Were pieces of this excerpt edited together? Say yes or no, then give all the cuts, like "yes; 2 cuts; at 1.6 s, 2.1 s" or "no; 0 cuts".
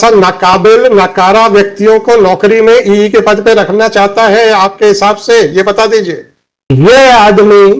yes; 1 cut; at 6.7 s